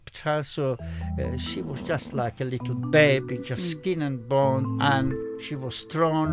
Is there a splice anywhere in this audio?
yes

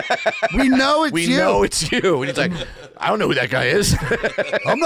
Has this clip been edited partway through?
no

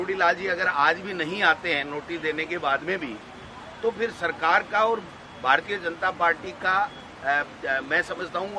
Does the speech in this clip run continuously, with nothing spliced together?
yes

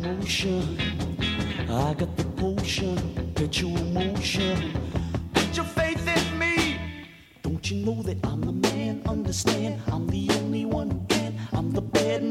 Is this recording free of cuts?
yes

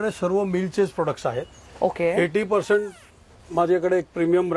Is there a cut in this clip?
no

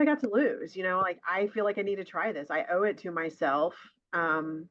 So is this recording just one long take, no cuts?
yes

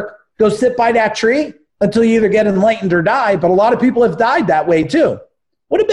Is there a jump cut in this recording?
no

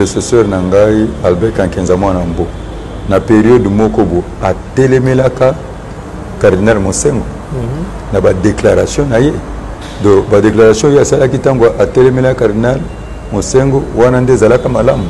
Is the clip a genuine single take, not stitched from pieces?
yes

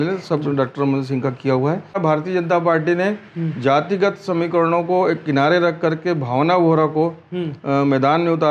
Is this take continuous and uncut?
no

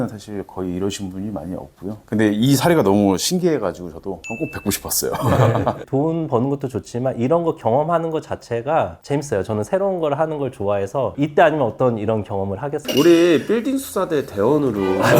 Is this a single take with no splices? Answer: no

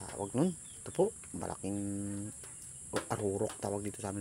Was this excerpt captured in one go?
yes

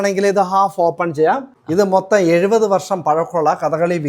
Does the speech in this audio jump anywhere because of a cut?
yes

